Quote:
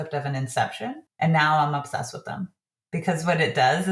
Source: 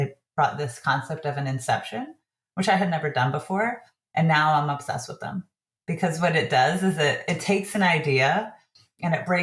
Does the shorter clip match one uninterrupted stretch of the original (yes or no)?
no